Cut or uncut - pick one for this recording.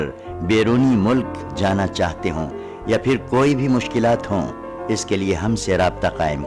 uncut